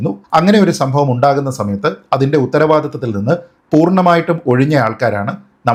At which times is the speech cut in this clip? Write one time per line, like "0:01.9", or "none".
none